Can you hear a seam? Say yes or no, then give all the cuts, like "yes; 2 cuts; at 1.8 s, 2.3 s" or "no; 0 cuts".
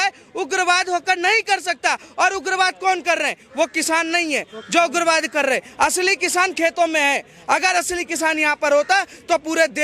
no; 0 cuts